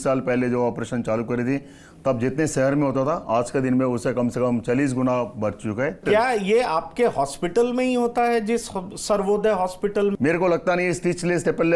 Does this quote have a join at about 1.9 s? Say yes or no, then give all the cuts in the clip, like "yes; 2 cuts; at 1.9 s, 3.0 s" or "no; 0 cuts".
no; 2 cuts; at 6.0 s, 10.2 s